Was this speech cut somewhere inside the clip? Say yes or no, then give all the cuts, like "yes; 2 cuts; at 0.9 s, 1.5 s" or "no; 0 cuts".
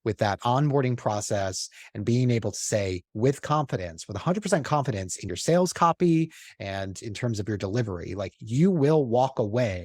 no; 0 cuts